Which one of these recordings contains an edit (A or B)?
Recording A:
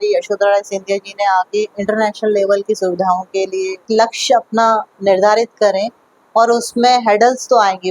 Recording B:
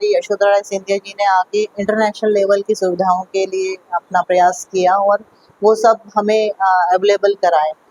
A